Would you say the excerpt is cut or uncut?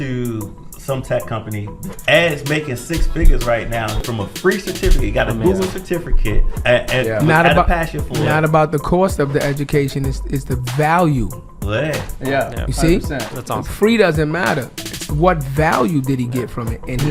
cut